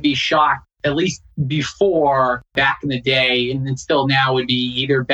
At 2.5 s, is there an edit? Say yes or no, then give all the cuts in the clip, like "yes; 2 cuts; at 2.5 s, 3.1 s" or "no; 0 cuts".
yes; 1 cut; at 2.5 s